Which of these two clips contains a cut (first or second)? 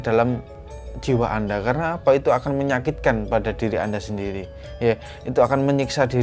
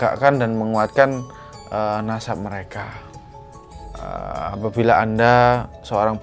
second